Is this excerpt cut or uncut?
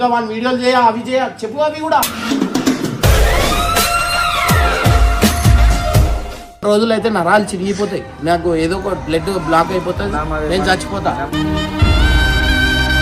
cut